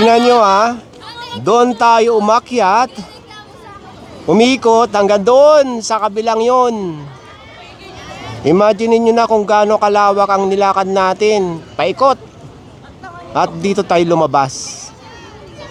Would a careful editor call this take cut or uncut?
uncut